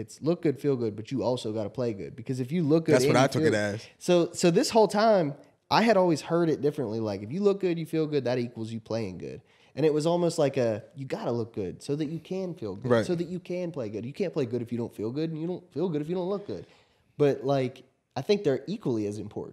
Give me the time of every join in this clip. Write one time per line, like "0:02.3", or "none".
none